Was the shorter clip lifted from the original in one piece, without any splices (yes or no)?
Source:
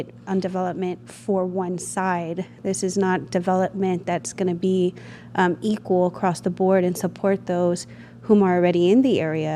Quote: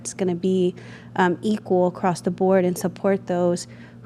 yes